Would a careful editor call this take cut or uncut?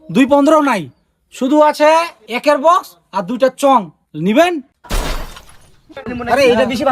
cut